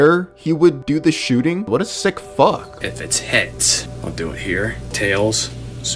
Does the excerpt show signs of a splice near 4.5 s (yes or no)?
no